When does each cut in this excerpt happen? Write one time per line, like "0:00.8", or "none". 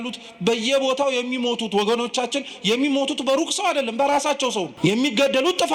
0:04.7